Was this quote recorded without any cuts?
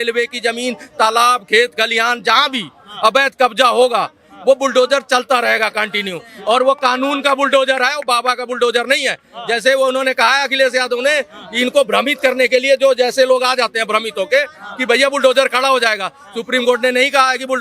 yes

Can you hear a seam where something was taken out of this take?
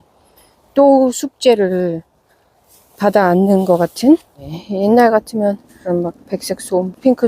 yes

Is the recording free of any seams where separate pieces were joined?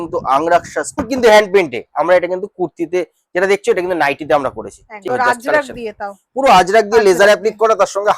no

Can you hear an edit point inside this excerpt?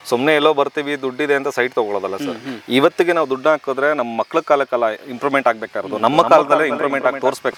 no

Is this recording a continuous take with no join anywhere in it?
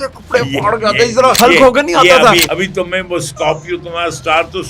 no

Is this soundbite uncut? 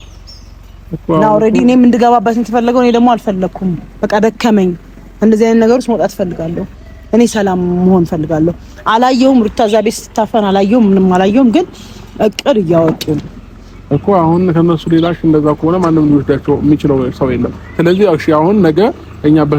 yes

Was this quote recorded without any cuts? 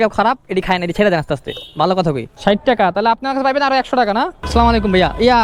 no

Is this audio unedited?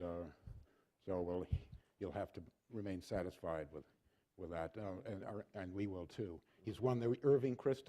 no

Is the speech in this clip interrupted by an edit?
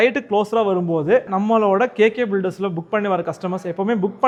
no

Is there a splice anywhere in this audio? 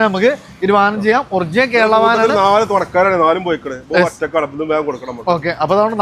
no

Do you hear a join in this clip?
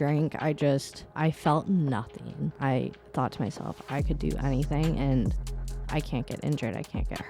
yes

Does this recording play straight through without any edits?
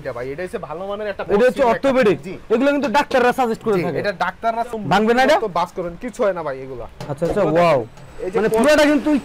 yes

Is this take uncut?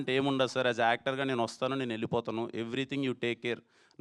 yes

